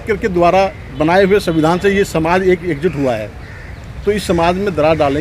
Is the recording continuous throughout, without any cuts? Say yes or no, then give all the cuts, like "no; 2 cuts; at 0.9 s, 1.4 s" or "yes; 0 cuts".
yes; 0 cuts